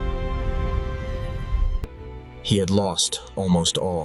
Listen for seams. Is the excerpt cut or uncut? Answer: cut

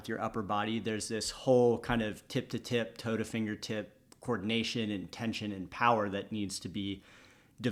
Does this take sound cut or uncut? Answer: uncut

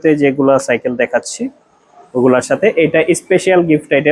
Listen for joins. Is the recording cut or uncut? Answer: uncut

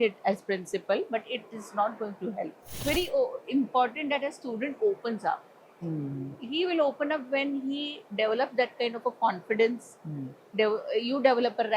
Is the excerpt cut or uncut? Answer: cut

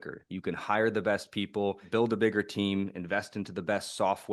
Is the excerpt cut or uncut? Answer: cut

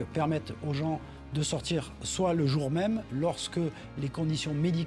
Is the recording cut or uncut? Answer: uncut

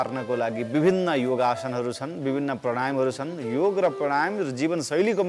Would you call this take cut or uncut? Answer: uncut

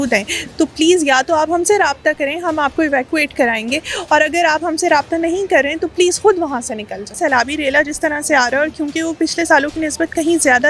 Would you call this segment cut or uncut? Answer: cut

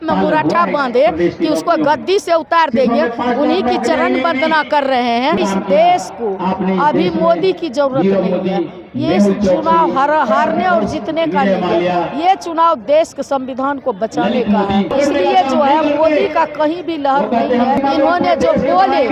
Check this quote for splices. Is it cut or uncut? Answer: cut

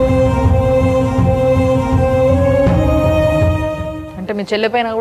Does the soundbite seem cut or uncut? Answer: cut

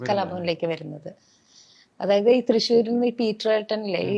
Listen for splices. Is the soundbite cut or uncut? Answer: uncut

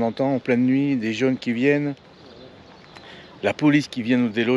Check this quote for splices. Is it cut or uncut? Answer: uncut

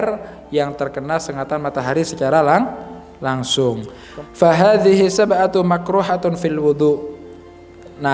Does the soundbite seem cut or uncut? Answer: cut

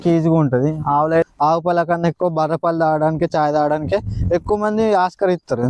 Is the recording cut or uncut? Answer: cut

